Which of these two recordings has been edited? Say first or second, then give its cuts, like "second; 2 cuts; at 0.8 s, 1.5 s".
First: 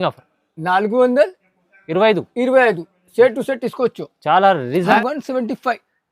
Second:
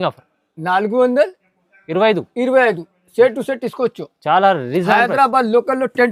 first; 1 cut; at 5.0 s